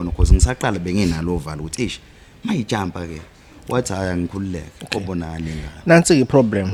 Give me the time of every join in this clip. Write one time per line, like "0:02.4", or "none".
none